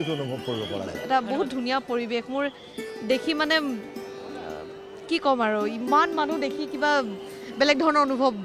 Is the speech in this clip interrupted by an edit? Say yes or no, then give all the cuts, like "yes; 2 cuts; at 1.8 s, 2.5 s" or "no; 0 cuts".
yes; 1 cut; at 0.9 s